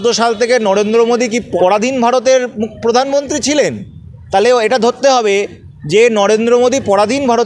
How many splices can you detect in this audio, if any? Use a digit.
1